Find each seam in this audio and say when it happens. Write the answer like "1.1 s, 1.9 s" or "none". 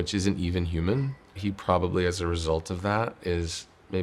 1.4 s